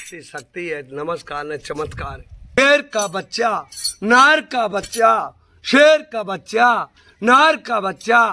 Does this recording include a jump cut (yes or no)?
yes